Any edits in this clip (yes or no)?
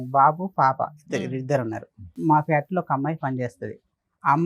yes